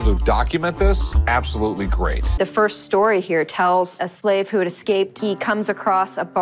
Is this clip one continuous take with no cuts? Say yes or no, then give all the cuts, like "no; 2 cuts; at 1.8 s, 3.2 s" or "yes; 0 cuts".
no; 1 cut; at 2.3 s